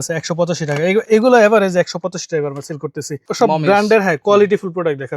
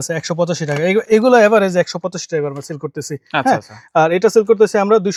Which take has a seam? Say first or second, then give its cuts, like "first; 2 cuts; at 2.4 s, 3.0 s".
first; 1 cut; at 3.2 s